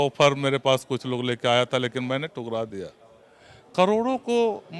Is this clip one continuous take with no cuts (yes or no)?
yes